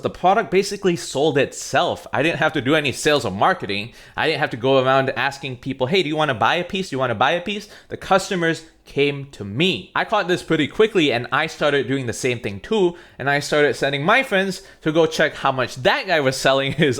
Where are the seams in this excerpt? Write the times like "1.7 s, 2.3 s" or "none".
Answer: 9.8 s